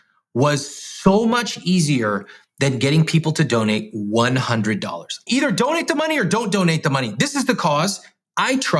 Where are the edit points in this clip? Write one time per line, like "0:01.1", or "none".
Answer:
0:05.2